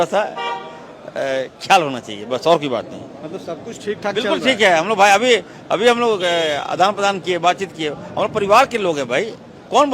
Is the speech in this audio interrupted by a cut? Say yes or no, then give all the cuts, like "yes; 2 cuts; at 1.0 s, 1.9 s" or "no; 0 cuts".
no; 0 cuts